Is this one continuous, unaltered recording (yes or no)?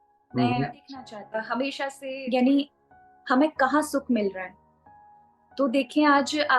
no